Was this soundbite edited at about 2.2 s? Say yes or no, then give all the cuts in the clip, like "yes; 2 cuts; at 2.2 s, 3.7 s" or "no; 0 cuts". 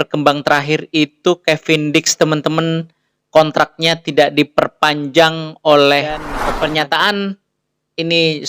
no; 1 cut; at 6.3 s